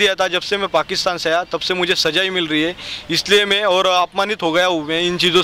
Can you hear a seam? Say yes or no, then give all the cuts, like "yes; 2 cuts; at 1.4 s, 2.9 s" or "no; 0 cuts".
no; 0 cuts